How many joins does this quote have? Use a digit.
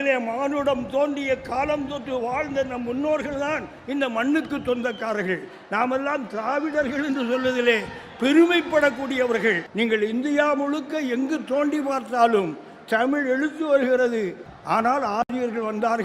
2